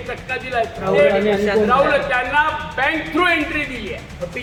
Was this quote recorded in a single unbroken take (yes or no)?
yes